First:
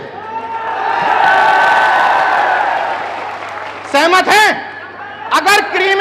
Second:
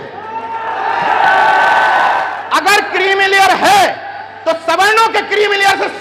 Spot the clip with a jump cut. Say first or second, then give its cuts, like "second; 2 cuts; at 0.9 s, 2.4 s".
second; 1 cut; at 2.3 s